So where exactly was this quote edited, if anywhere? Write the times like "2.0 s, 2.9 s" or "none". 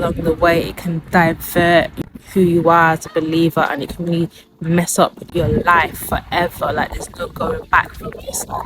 1.9 s, 5.3 s